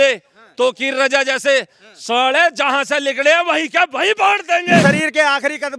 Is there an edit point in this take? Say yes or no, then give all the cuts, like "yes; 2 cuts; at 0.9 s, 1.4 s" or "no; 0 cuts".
yes; 1 cut; at 4.8 s